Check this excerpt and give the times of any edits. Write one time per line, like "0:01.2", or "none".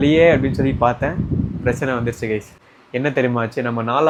none